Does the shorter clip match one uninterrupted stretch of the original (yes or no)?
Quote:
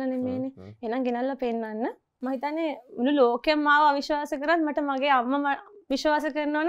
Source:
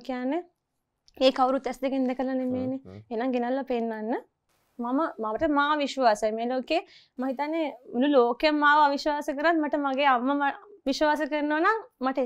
no